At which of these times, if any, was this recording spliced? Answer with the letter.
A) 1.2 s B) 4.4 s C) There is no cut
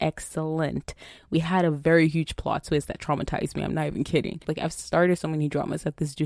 B